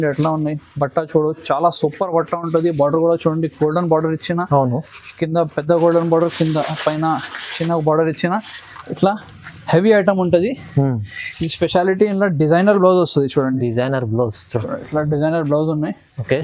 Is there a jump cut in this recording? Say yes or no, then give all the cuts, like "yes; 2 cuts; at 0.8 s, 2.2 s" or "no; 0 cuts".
no; 0 cuts